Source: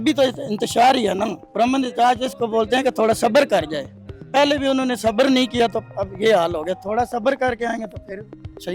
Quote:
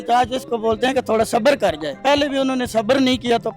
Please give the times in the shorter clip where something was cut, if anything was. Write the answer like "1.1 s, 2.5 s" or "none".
1.9 s